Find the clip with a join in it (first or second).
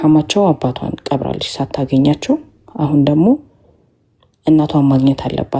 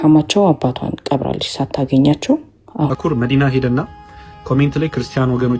second